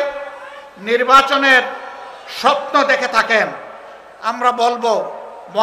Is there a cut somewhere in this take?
no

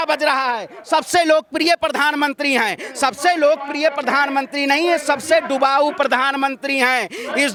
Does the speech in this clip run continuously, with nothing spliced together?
yes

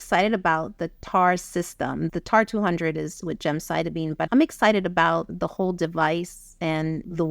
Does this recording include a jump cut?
yes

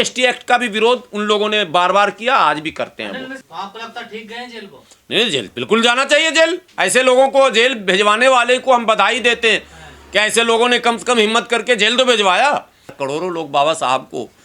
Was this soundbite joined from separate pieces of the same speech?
yes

